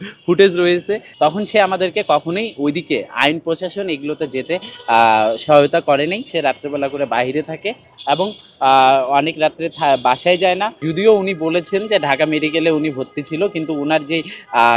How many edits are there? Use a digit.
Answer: 3